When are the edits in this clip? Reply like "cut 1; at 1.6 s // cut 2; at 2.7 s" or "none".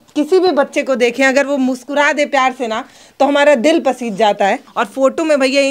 cut 1; at 4.7 s